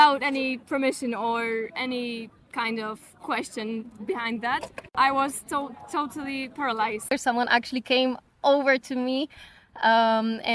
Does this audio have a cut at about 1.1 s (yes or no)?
no